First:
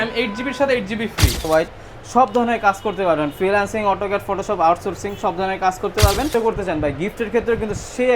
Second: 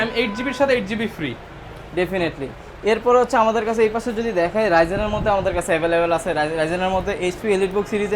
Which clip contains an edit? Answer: first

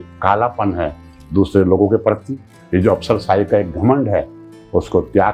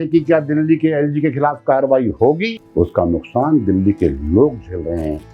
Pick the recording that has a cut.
second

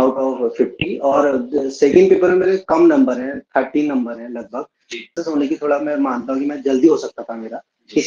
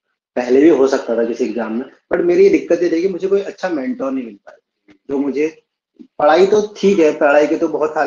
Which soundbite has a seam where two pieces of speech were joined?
first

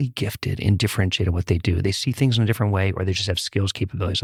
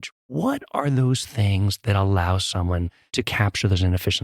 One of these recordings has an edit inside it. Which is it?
second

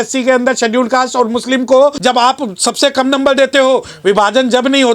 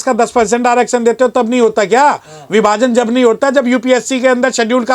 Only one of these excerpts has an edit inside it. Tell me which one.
first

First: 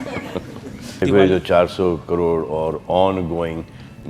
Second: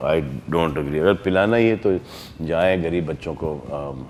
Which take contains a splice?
first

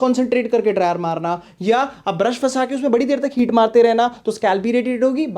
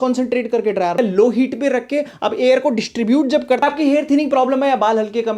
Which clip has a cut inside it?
second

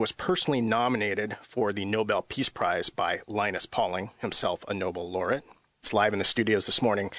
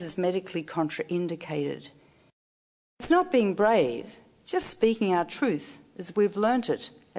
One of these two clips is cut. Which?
first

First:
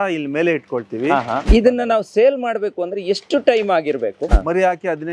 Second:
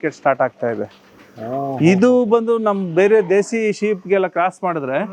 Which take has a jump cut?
first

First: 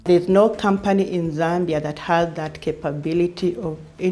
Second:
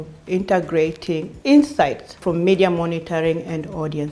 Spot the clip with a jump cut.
second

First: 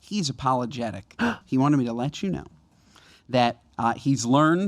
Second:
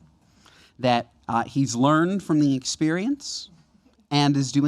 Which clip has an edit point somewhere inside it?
first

